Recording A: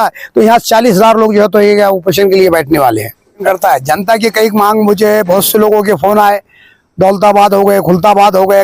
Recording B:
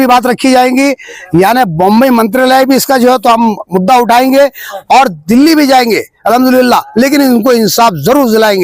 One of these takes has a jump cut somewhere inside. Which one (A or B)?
A